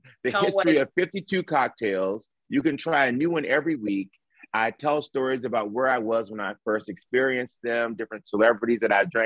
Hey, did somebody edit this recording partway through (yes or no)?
no